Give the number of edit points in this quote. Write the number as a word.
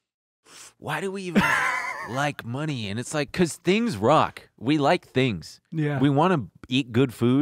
one